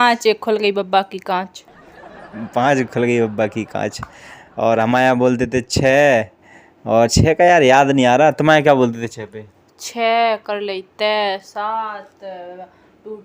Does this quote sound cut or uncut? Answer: uncut